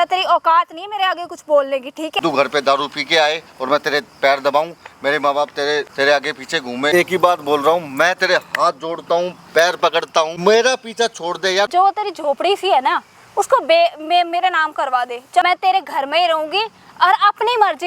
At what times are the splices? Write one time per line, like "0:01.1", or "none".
0:02.1
0:05.9
0:06.9
0:10.3
0:11.7
0:15.4